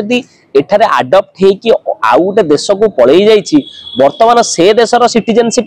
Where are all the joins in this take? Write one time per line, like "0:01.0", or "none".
none